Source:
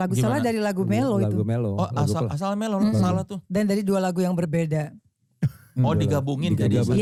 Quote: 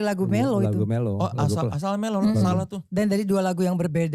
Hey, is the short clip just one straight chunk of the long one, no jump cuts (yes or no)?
yes